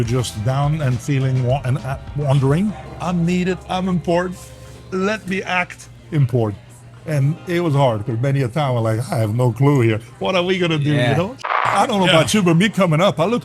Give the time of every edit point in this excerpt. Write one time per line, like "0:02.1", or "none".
0:02.9
0:11.4